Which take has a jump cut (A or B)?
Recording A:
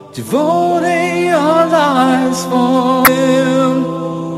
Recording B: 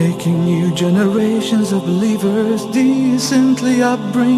A